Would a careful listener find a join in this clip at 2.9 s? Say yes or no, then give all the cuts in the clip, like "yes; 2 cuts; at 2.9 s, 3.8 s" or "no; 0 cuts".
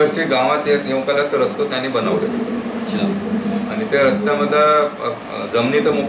no; 0 cuts